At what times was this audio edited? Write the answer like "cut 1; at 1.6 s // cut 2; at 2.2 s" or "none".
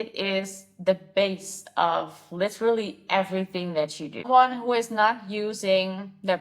cut 1; at 4.3 s